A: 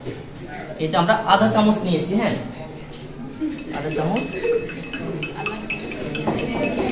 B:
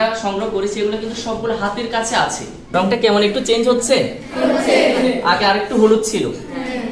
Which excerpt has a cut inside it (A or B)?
B